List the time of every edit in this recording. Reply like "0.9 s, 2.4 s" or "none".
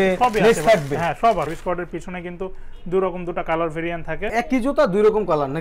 1.5 s, 4.3 s